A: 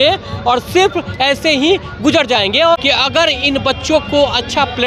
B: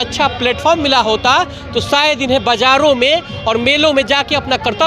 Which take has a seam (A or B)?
A